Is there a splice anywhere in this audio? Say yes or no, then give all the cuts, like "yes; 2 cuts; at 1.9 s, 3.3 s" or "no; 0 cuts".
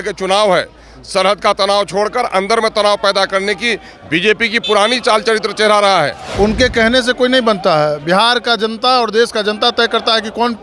yes; 1 cut; at 6.2 s